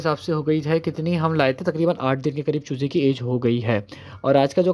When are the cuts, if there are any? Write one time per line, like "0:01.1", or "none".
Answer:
none